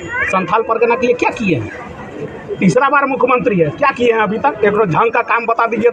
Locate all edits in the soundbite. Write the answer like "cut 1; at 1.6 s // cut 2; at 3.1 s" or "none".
none